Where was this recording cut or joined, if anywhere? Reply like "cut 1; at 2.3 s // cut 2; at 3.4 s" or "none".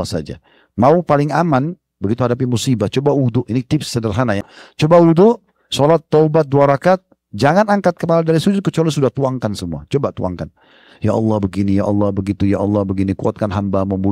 cut 1; at 4.5 s